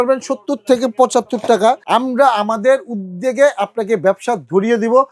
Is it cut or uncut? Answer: cut